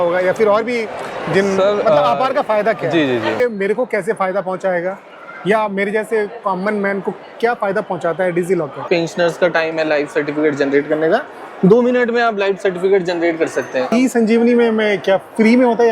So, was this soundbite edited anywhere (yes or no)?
yes